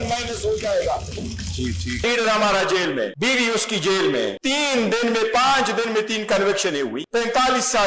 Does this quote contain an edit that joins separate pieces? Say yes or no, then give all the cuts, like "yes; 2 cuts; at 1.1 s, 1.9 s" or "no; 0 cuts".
yes; 4 cuts; at 2.0 s, 3.1 s, 4.4 s, 7.0 s